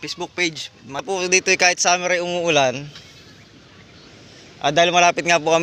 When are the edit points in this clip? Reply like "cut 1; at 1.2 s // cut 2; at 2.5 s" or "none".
cut 1; at 1.0 s